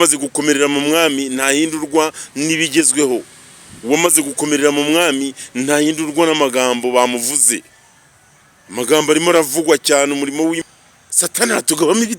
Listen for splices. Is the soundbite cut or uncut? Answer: cut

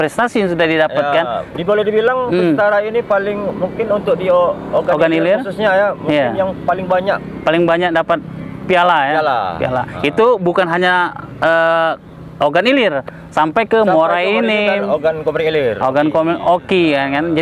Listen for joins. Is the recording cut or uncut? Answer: uncut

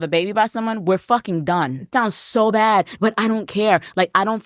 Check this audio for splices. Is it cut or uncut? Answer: cut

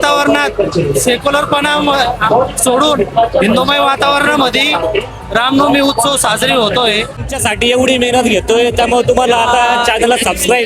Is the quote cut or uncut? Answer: cut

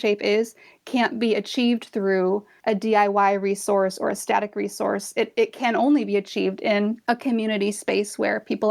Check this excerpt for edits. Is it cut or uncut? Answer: cut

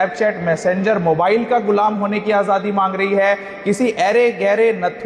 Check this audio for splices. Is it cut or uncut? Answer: uncut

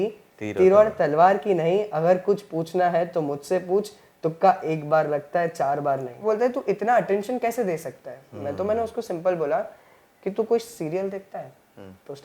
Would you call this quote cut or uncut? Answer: cut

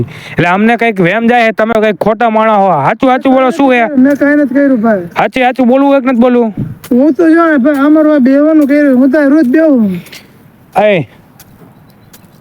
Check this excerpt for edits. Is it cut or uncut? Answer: uncut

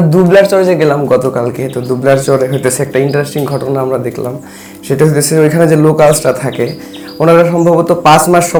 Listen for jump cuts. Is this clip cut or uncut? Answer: uncut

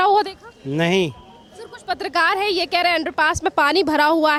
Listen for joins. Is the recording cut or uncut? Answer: uncut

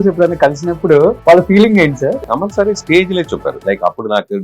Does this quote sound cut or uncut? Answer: cut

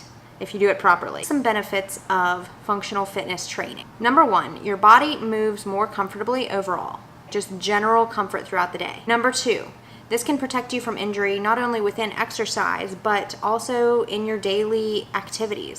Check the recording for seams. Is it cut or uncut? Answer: cut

